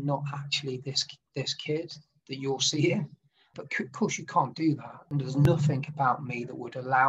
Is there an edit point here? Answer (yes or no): yes